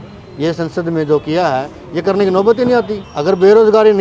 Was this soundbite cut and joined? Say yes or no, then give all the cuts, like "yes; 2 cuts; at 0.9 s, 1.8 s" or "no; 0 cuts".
yes; 1 cut; at 3.0 s